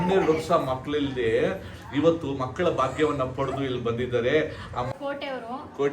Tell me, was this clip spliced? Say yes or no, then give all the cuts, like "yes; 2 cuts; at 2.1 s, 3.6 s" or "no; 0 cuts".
yes; 1 cut; at 4.9 s